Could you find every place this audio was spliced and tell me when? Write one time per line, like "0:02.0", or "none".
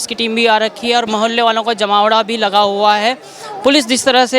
none